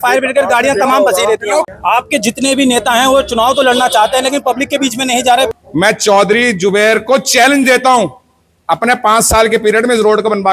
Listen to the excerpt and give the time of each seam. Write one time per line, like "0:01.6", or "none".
0:01.7
0:05.5